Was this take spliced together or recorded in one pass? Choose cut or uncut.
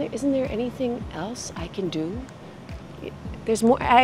uncut